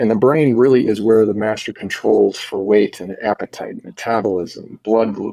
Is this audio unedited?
yes; 0 cuts

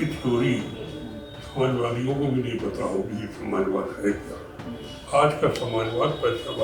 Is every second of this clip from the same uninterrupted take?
yes; 0 cuts

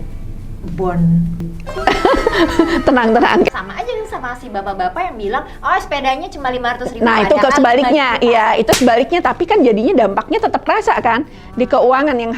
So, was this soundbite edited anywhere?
yes; 2 cuts; at 1.4 s, 3.5 s

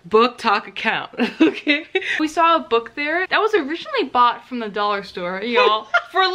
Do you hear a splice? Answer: yes; 2 cuts; at 2.2 s, 3.3 s

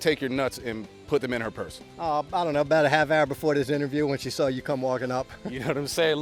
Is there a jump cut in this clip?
no; 0 cuts

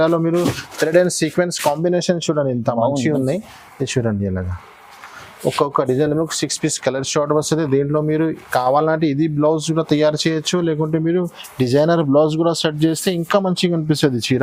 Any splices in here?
no; 0 cuts

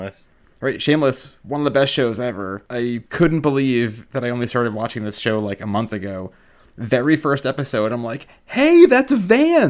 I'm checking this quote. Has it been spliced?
yes; 3 cuts; at 1.3 s, 3.0 s, 4.0 s

